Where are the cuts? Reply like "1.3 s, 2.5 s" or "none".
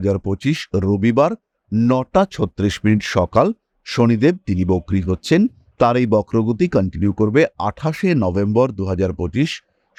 none